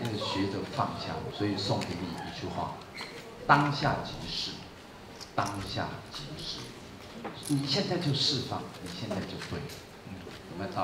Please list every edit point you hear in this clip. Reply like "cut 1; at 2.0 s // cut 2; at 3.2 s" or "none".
cut 1; at 1.3 s // cut 2; at 7.4 s